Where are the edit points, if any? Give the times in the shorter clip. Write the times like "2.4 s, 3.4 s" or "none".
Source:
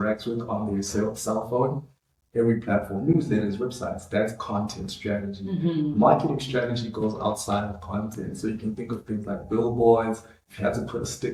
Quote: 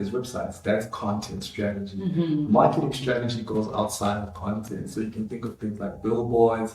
none